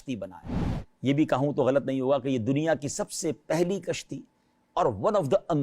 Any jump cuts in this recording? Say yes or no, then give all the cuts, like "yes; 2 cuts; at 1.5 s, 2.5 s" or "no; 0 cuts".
no; 0 cuts